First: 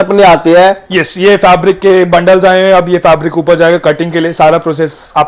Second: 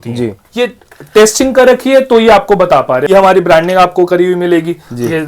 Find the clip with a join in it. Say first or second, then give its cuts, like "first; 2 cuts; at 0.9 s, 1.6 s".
second; 1 cut; at 3.0 s